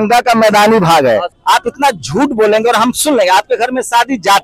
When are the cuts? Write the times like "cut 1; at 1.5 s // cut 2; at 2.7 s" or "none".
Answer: cut 1; at 1.3 s